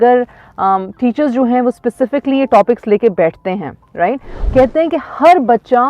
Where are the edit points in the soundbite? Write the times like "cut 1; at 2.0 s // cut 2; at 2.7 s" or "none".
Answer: cut 1; at 4.3 s